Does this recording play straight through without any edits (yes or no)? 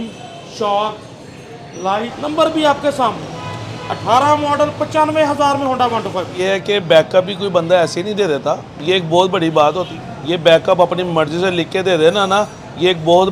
no